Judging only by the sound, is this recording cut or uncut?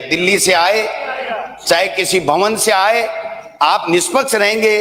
uncut